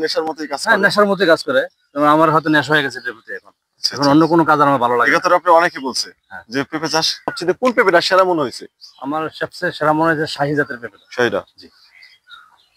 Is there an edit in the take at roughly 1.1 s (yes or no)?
no